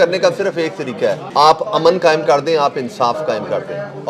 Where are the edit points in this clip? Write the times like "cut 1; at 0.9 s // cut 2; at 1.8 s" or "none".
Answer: cut 1; at 1.2 s